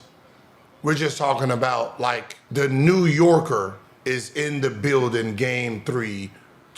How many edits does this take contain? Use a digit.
1